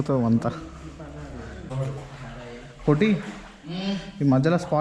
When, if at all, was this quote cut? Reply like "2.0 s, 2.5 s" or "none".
1.7 s